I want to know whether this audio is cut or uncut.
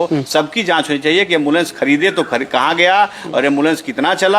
uncut